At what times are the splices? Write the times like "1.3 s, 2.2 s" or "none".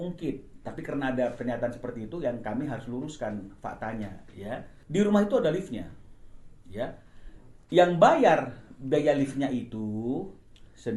4.7 s